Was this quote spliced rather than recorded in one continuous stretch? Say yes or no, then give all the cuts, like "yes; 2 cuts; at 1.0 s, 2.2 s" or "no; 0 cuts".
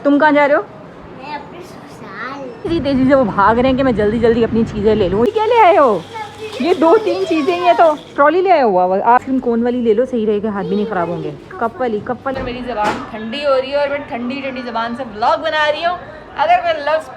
yes; 4 cuts; at 2.7 s, 5.3 s, 9.2 s, 12.4 s